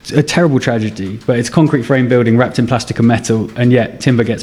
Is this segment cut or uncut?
uncut